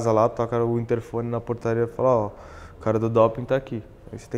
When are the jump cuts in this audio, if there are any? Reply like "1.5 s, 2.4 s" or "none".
none

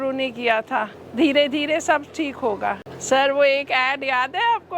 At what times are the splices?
1.0 s, 2.9 s

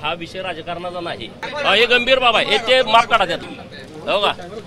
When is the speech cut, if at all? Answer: 1.4 s, 3.5 s

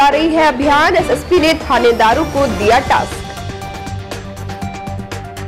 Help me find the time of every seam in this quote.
none

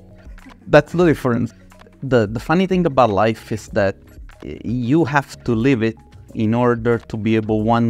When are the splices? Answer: 1.5 s

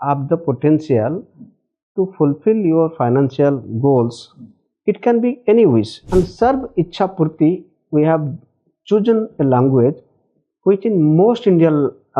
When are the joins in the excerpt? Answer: 6.0 s

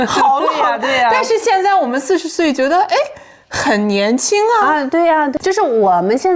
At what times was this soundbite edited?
5.3 s

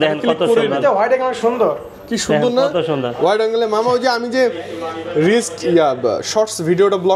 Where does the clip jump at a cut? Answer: none

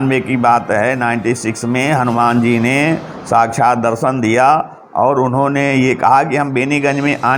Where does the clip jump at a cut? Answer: none

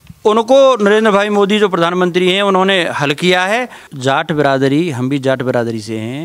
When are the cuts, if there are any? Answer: 3.8 s

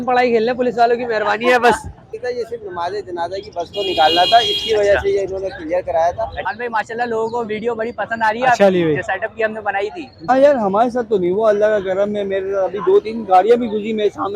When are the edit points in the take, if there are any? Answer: 2.1 s, 6.5 s, 10.3 s

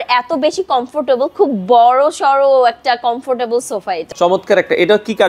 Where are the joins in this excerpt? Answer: 4.0 s

